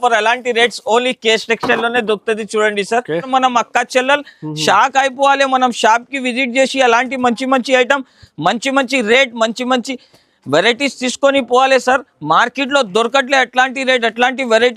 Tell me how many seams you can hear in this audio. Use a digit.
1